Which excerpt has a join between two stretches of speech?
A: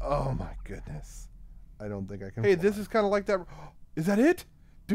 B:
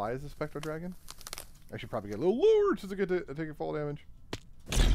A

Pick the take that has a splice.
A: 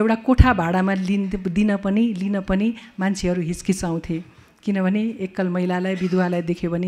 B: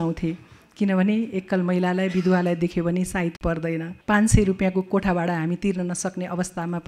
B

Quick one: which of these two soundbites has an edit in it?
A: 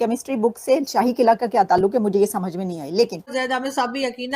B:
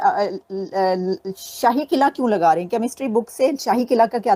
A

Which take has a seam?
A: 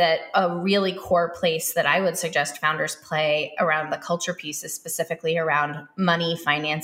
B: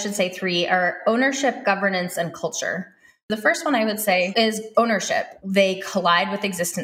B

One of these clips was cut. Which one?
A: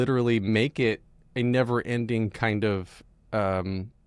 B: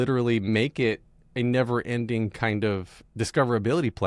B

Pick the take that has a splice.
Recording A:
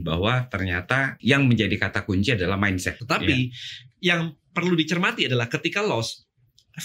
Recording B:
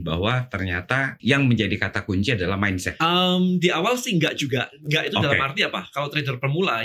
A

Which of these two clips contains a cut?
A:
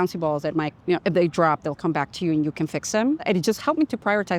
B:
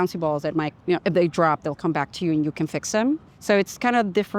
A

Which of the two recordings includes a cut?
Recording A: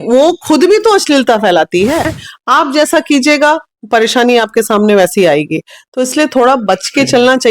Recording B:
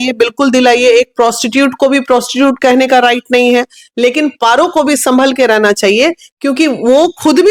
A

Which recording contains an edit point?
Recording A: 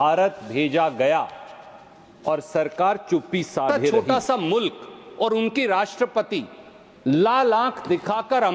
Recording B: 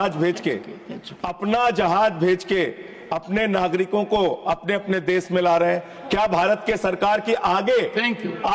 A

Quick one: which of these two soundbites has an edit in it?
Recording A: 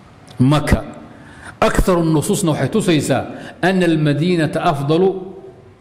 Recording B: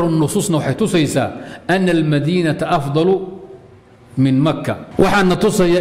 B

